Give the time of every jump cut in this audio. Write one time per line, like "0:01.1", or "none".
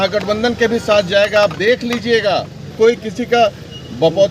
0:02.7